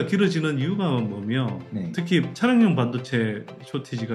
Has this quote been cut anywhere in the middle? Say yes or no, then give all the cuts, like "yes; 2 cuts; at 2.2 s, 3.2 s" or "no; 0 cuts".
no; 0 cuts